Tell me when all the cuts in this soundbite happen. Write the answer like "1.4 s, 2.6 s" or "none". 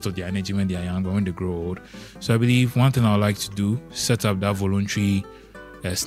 none